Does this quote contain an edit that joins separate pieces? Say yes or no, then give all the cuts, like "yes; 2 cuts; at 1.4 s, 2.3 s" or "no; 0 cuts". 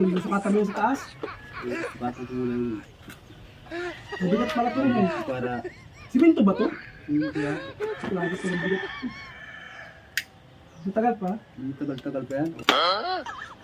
yes; 1 cut; at 12.7 s